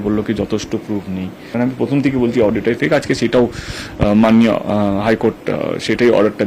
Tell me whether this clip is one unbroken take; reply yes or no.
yes